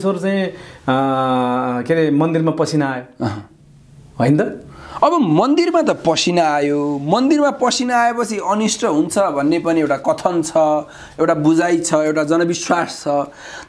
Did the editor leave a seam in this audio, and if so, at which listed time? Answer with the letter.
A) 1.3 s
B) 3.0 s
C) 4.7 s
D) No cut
D